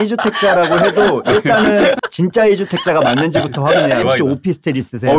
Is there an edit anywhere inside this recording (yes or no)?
yes